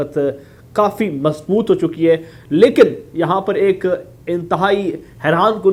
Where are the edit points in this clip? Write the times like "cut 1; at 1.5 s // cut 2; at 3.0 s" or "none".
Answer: none